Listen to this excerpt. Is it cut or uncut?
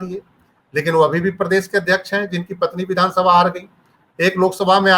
uncut